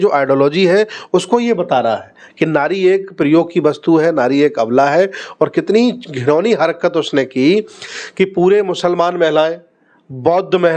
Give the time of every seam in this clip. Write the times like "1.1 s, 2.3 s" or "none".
none